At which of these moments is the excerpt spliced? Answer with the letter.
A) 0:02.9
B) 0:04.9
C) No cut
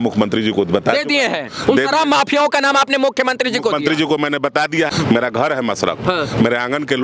B